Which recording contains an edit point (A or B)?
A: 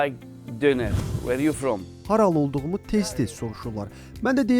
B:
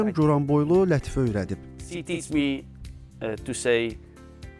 A